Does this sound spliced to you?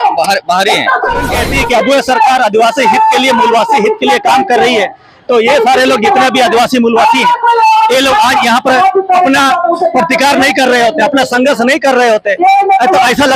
yes; 1 cut; at 1.3 s

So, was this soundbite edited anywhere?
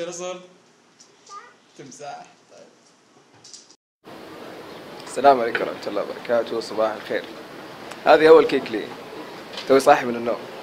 yes; 1 cut; at 3.7 s

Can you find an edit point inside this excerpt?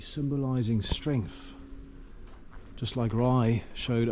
no; 0 cuts

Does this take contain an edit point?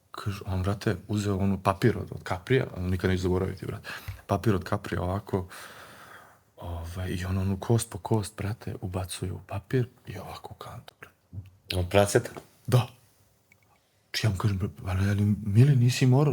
no; 0 cuts

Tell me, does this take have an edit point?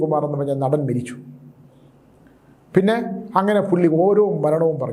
no; 0 cuts

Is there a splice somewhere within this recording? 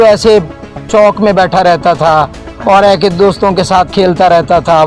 no; 0 cuts

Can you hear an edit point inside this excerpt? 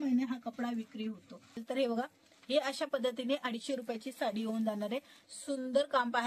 yes; 2 cuts; at 1.6 s, 5.2 s

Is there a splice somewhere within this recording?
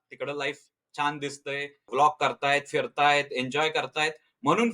yes; 1 cut; at 1.9 s

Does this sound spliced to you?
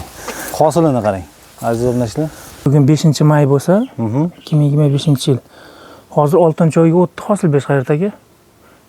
yes; 1 cut; at 2.7 s

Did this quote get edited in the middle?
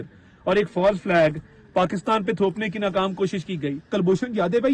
yes; 1 cut; at 3.8 s

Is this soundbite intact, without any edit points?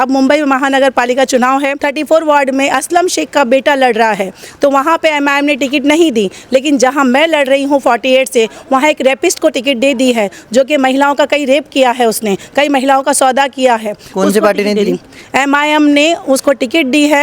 no; 1 cut; at 1.8 s

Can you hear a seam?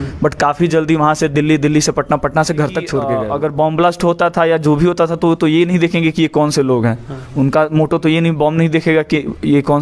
yes; 1 cut; at 3.1 s

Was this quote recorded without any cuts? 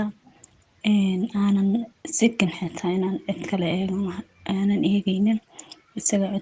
yes; 0 cuts

